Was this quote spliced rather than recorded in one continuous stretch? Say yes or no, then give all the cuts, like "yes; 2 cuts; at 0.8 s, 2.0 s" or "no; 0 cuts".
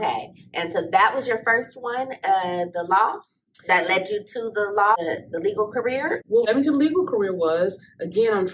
yes; 2 cuts; at 5.0 s, 6.4 s